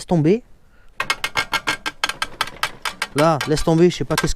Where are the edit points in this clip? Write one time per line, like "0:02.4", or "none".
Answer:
0:00.9